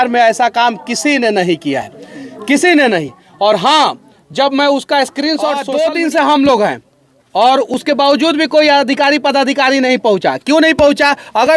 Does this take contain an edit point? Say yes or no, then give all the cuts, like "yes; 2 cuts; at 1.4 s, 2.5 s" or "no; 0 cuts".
yes; 1 cut; at 5.6 s